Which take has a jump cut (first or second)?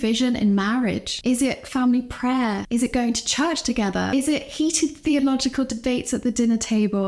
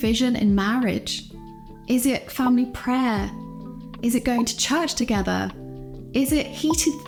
first